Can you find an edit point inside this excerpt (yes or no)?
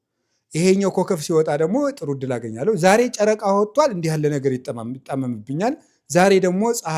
no